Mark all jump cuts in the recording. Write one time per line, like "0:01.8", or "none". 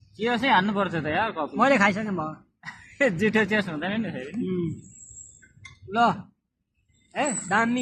0:03.2

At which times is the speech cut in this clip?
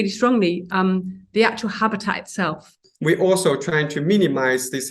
0:02.8

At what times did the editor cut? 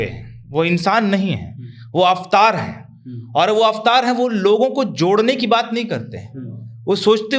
none

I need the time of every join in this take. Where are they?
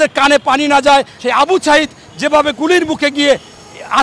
0:01.2

